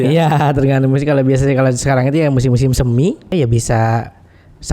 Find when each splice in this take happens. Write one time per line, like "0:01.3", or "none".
0:03.3